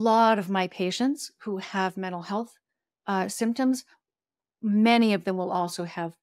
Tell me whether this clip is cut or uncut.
uncut